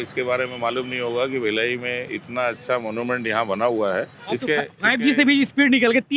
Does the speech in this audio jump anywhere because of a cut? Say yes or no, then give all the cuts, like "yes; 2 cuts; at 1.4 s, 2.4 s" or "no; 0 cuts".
yes; 1 cut; at 4.2 s